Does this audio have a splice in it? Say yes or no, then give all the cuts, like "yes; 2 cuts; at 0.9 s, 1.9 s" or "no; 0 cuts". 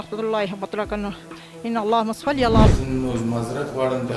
yes; 1 cut; at 2.7 s